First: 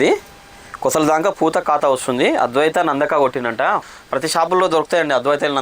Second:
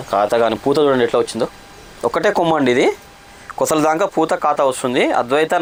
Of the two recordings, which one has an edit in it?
first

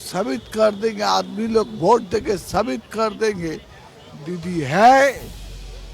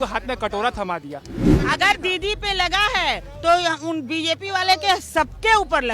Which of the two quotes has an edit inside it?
second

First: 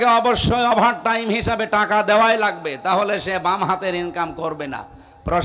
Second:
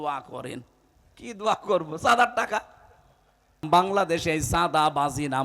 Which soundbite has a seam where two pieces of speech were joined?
second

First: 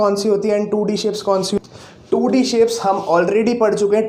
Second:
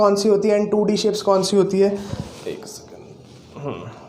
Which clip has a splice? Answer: first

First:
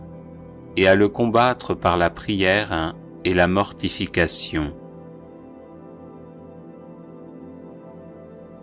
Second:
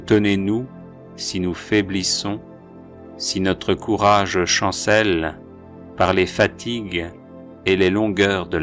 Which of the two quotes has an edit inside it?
first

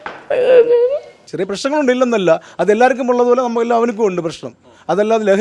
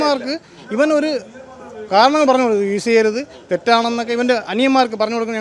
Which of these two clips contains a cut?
first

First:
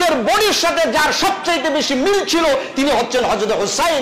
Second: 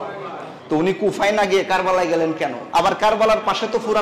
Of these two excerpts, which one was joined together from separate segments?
second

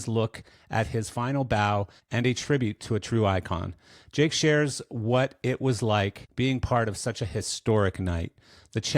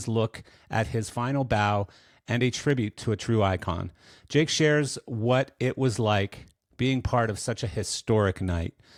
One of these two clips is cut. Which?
first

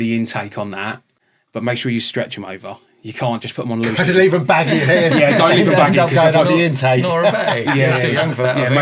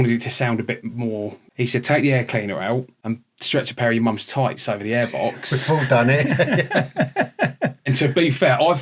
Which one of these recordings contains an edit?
second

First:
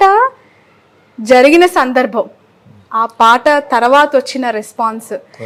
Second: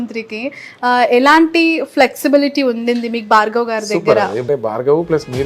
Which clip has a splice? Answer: second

